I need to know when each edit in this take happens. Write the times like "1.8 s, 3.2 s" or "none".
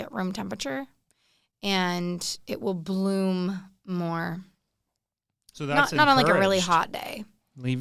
none